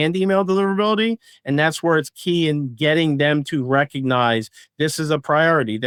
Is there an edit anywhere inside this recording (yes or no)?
no